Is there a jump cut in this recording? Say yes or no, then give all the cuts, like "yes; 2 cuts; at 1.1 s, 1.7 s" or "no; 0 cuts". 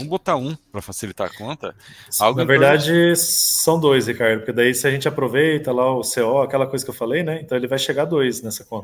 no; 0 cuts